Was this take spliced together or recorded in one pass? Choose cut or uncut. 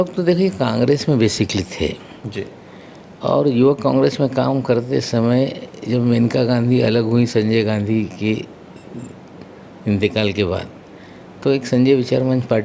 uncut